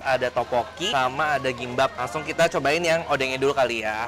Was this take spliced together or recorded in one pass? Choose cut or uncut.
cut